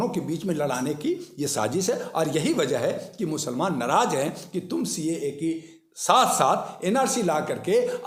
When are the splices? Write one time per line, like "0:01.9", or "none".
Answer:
none